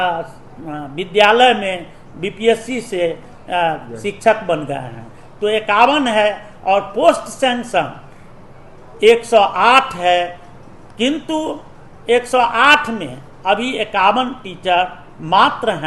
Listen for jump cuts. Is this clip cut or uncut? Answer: uncut